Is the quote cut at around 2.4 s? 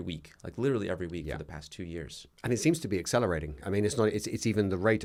no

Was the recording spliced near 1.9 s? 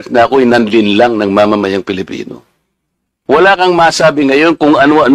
no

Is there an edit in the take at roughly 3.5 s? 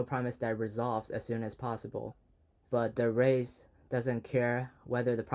no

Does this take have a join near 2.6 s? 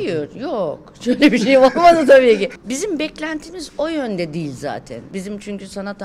yes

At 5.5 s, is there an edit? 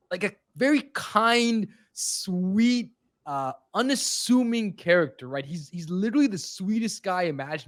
no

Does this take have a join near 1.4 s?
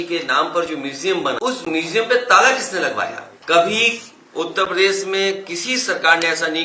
yes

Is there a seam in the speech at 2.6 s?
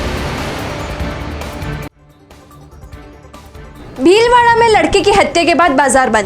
yes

